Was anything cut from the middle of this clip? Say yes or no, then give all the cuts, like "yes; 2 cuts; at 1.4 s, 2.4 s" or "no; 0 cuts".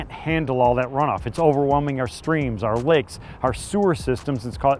no; 0 cuts